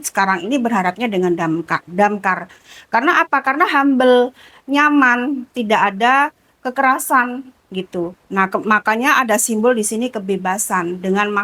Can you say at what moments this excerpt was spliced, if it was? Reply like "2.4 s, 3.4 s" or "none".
none